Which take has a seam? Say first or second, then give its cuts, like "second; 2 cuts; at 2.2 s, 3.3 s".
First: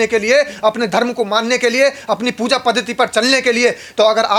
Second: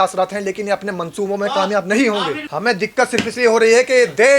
second; 1 cut; at 2.4 s